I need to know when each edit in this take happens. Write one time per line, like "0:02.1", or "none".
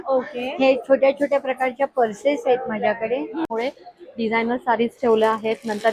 0:03.5